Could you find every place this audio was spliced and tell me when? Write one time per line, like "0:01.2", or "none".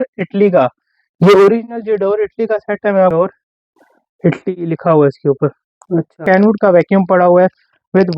0:03.1
0:06.2